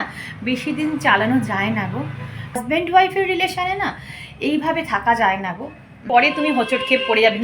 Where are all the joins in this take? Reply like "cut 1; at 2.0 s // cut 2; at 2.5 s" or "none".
cut 1; at 2.6 s // cut 2; at 6.0 s

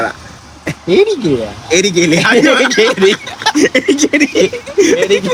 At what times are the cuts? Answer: none

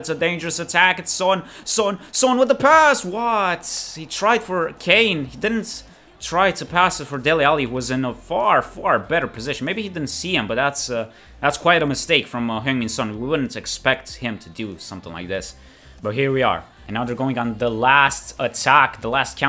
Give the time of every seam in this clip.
none

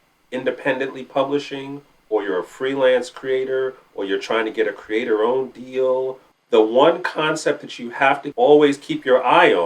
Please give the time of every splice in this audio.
cut 1; at 6.2 s // cut 2; at 8.3 s

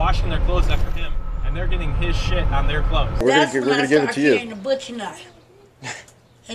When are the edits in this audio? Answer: cut 1; at 3.2 s

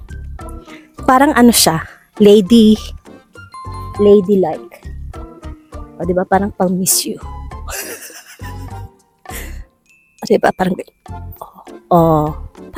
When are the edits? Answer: none

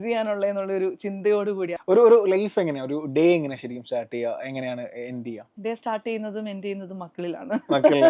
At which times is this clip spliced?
cut 1; at 1.8 s // cut 2; at 5.5 s

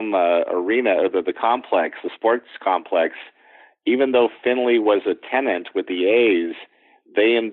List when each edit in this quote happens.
none

